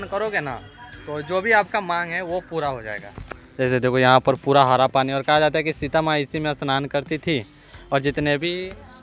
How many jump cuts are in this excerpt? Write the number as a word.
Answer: zero